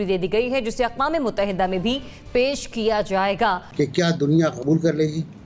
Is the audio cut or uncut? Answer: cut